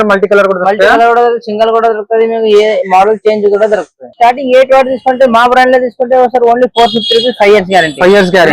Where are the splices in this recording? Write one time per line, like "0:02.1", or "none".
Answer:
0:04.1